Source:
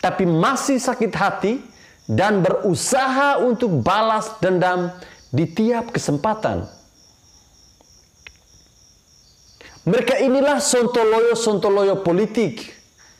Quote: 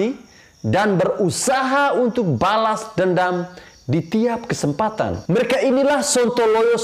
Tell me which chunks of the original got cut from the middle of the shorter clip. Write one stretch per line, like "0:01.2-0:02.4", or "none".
0:06.6-0:09.8